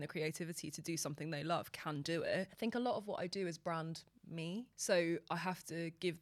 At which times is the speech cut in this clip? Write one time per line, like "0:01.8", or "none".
0:02.5